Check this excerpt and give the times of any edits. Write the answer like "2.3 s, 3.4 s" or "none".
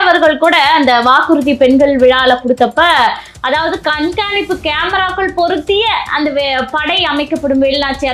none